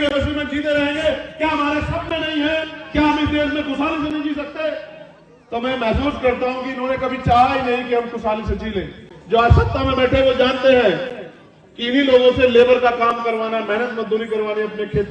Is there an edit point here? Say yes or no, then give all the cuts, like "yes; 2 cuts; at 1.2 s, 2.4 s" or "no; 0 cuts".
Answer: no; 0 cuts